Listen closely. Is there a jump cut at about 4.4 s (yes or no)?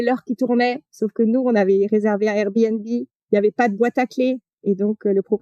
no